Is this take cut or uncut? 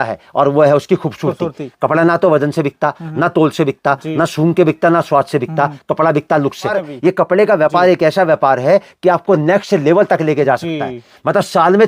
cut